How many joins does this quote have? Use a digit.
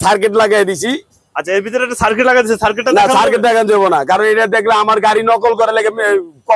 0